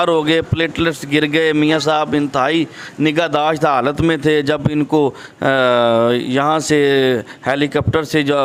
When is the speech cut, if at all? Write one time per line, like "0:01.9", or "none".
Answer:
none